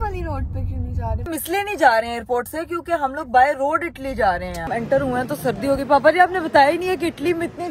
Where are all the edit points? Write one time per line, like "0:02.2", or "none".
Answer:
0:01.4
0:04.7